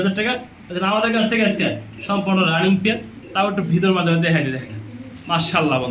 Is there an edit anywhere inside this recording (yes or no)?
no